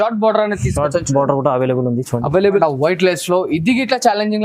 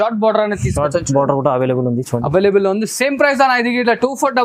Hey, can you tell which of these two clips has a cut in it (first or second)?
first